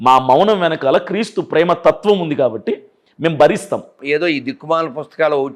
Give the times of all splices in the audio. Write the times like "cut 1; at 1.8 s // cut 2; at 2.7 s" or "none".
cut 1; at 3.9 s